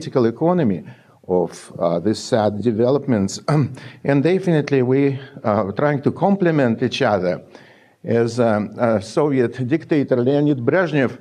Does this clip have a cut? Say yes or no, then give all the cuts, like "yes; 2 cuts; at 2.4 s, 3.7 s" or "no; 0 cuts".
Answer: no; 0 cuts